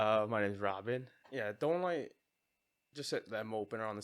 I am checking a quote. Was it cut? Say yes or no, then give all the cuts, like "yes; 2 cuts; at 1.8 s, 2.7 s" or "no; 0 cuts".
yes; 1 cut; at 1.2 s